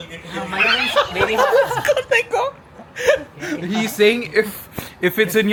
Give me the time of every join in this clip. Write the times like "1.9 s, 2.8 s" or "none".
none